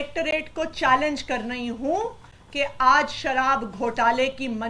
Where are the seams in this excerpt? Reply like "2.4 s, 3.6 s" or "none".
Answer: none